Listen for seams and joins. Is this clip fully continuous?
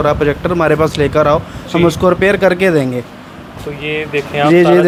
yes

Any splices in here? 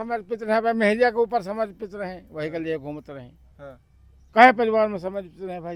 no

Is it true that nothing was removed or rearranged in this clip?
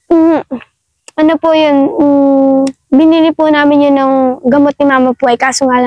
yes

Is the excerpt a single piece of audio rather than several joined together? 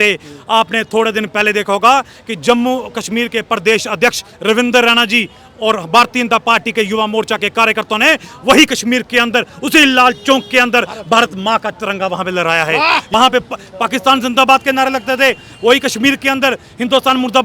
no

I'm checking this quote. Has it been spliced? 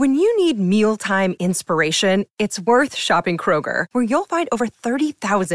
no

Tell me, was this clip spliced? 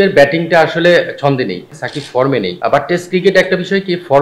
yes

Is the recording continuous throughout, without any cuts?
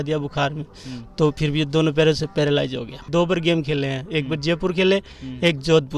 no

